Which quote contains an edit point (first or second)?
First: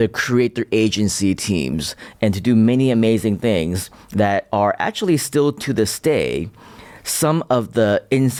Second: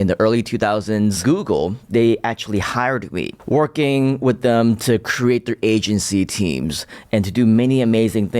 second